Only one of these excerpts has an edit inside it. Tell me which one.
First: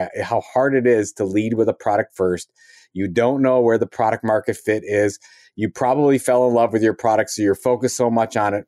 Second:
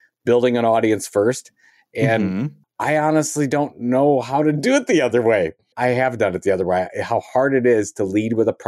second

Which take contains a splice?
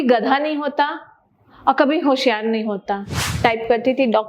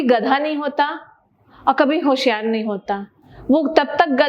first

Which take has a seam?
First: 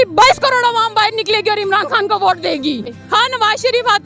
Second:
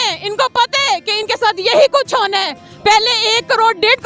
first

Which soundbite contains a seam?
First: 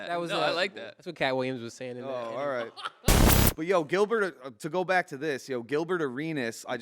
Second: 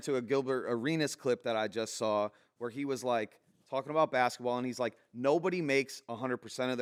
first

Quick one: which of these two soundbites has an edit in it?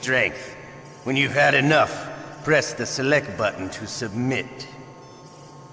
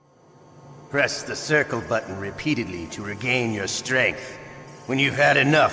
second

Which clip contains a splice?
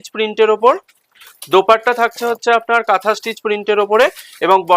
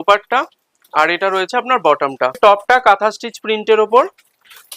second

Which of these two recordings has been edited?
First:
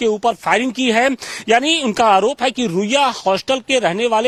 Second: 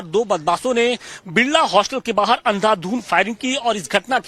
second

